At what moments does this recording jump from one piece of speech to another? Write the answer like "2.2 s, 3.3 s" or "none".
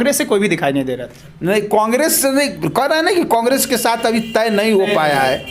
none